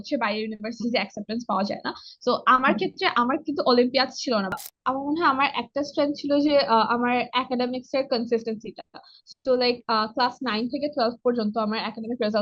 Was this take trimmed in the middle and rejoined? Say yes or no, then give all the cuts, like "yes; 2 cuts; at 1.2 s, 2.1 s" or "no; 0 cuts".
yes; 1 cut; at 4.5 s